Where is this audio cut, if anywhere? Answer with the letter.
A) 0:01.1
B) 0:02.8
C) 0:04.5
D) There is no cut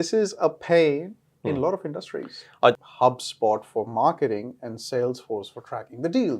B